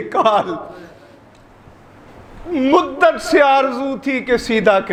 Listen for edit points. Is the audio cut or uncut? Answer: uncut